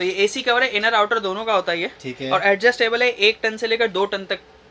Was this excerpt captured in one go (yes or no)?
yes